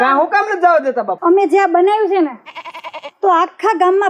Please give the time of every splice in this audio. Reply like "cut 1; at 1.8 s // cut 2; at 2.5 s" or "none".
cut 1; at 1.1 s